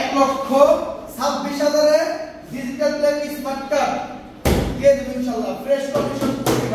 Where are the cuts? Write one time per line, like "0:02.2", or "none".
none